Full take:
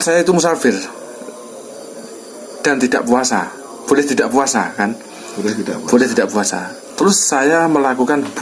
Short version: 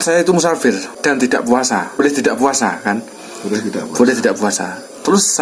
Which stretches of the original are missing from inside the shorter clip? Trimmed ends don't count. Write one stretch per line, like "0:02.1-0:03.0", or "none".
0:00.9-0:02.5
0:03.6-0:03.9